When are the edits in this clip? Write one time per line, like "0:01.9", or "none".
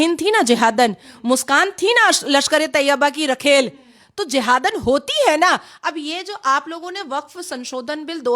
none